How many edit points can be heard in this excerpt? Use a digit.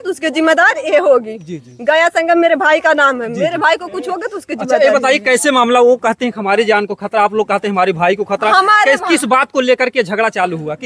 0